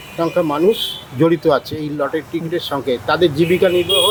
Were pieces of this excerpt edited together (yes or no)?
no